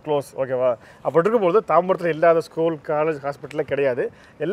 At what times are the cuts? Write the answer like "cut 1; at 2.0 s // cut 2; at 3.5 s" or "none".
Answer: none

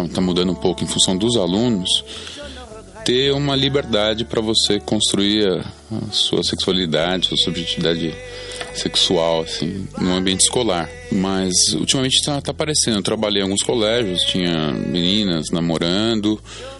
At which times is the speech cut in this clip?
cut 1; at 11.0 s

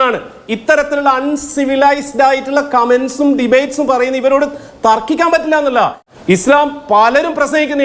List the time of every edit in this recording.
cut 1; at 6.1 s

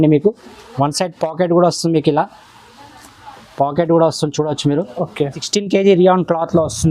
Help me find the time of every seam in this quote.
cut 1; at 5.4 s

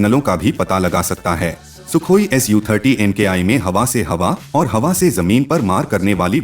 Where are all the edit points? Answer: cut 1; at 1.7 s

